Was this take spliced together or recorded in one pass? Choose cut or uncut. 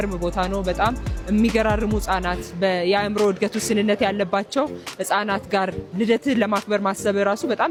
uncut